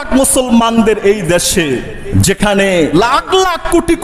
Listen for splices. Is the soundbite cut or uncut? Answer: cut